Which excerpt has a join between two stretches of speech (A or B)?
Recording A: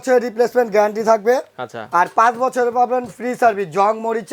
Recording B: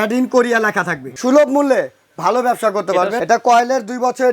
B